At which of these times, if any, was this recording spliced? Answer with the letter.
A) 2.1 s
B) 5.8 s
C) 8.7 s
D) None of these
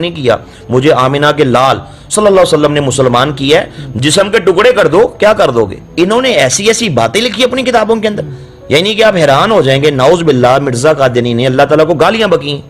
B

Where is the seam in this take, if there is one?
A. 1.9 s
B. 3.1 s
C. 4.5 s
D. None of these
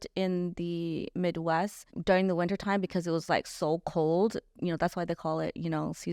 A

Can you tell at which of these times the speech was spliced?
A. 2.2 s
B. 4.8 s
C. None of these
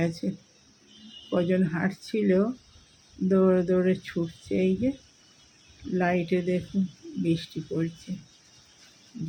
C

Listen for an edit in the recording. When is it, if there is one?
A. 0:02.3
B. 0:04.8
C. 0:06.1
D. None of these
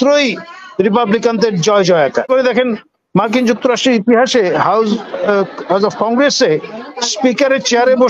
A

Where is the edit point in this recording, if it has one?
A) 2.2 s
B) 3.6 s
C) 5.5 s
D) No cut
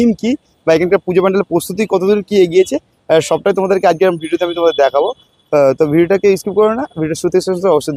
D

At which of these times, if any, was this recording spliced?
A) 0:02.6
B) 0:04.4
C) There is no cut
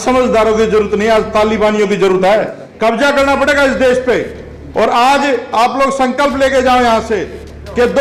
A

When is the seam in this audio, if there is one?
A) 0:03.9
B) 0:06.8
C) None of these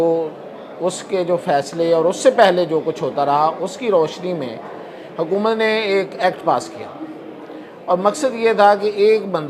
C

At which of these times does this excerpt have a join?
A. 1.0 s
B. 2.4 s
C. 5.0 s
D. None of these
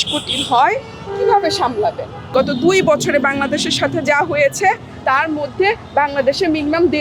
B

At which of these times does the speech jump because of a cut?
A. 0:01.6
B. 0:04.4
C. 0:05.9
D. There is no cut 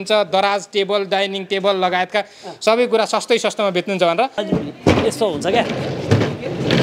B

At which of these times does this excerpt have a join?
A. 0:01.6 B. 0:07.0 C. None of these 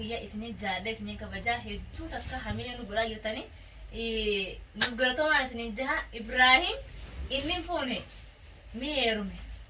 C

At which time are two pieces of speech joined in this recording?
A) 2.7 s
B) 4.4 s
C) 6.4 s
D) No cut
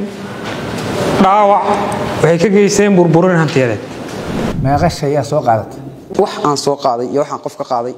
B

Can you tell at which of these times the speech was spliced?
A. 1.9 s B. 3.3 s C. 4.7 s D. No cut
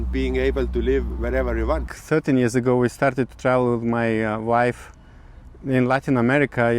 A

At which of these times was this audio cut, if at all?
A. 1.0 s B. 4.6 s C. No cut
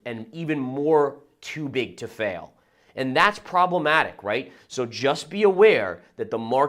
B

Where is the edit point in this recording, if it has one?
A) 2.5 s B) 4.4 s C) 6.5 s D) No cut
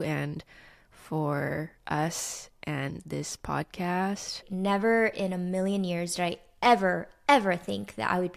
B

